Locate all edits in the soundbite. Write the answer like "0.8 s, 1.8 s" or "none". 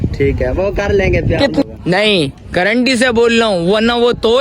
1.6 s